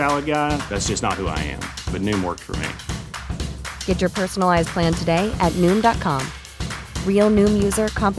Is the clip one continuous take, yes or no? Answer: yes